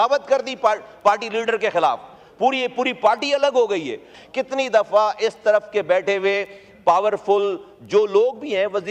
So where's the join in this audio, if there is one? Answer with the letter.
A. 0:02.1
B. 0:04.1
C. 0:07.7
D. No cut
B